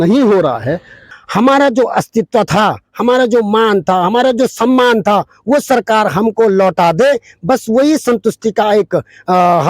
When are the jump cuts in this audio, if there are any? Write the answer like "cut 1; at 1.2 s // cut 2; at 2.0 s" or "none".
cut 1; at 1.0 s